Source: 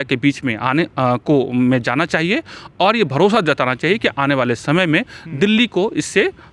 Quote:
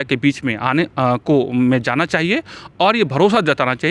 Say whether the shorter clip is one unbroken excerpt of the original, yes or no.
yes